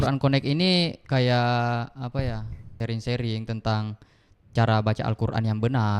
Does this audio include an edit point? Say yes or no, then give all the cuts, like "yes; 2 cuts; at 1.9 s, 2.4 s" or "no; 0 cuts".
yes; 1 cut; at 2.8 s